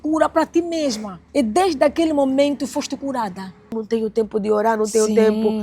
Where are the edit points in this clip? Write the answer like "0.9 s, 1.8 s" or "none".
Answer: 1.1 s, 3.8 s